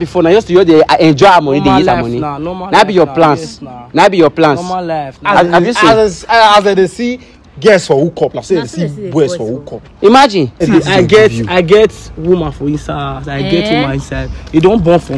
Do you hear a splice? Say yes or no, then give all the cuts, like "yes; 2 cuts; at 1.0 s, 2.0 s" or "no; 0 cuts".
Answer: yes; 1 cut; at 10.7 s